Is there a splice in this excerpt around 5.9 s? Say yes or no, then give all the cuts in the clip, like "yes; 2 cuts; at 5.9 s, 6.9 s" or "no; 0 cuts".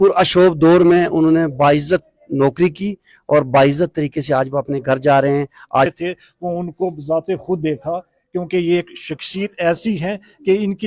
yes; 1 cut; at 5.9 s